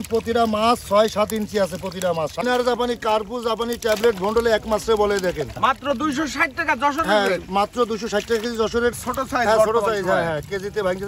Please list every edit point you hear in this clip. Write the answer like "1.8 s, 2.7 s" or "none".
2.4 s, 5.5 s, 8.9 s